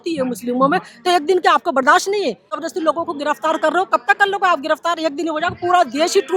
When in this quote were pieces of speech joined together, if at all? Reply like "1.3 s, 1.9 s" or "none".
2.5 s